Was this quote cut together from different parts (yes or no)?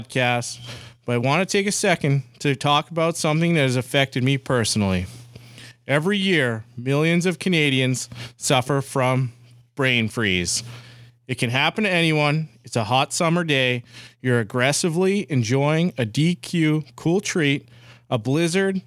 no